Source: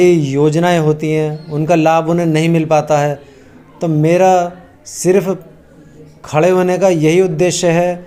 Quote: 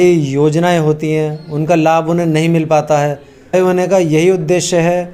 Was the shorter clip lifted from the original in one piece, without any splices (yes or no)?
no